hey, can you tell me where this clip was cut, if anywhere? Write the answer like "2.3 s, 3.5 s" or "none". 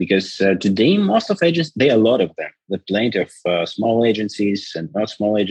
none